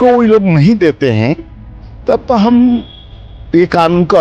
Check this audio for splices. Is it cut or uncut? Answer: uncut